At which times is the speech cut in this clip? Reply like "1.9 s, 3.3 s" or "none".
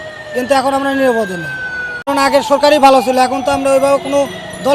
2.0 s